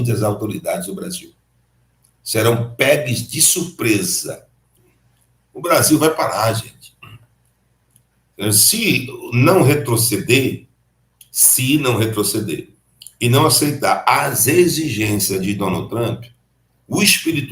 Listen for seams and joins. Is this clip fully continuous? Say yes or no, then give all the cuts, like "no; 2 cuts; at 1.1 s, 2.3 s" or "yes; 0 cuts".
no; 1 cut; at 4.8 s